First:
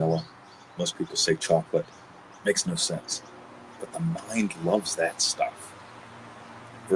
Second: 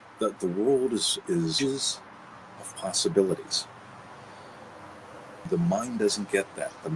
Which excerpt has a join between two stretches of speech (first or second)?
second